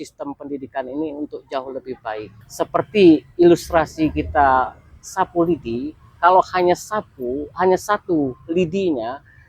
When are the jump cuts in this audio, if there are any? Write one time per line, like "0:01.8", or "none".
0:02.4